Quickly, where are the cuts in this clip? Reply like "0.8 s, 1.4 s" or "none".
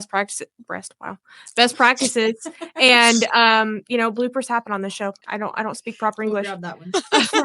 5.2 s